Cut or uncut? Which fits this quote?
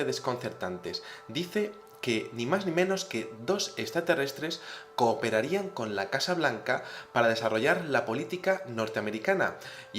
cut